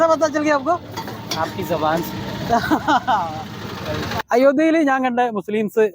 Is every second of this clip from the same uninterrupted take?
no; 1 cut; at 4.2 s

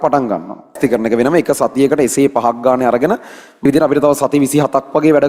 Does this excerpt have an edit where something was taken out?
yes; 2 cuts; at 0.8 s, 3.7 s

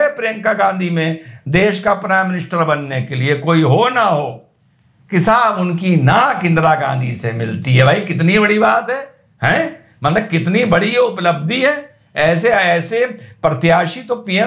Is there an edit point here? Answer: no; 0 cuts

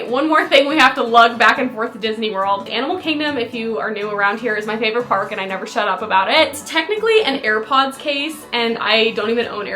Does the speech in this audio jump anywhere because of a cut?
yes; 2 cuts; at 2.7 s, 6.5 s

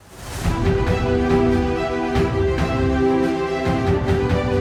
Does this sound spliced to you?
no; 0 cuts

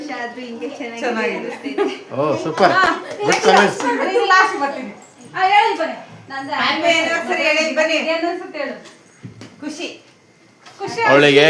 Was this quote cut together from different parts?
no; 0 cuts

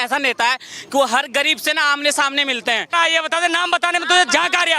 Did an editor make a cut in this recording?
yes; 1 cut; at 2.9 s

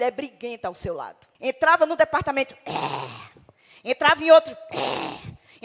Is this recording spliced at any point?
yes; 1 cut; at 1.2 s

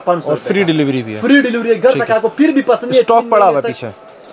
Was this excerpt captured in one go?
yes; 0 cuts

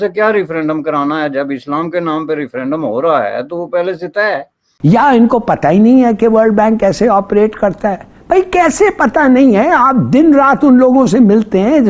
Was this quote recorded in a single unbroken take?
no; 1 cut; at 4.6 s

